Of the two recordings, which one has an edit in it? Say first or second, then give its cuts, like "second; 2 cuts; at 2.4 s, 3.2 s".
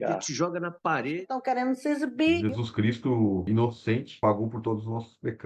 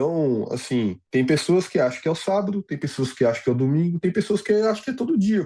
second; 1 cut; at 1.0 s